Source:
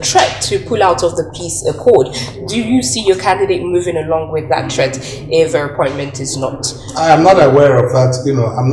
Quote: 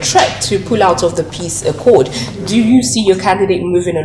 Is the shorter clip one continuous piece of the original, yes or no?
yes